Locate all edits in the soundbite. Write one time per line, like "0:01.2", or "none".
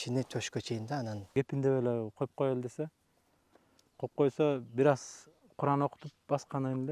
0:01.2